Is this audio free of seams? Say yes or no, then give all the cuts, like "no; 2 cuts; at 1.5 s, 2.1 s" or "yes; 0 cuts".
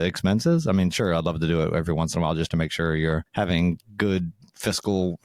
yes; 0 cuts